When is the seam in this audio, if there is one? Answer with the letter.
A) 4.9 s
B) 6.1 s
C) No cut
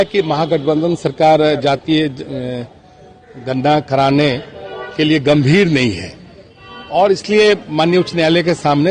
C